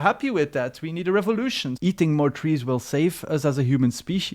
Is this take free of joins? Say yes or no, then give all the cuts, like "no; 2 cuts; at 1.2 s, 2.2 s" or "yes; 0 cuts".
no; 1 cut; at 1.7 s